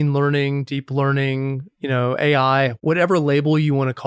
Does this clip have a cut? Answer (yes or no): yes